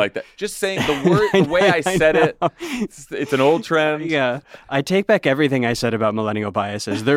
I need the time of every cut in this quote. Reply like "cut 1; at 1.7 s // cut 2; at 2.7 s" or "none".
cut 1; at 4.4 s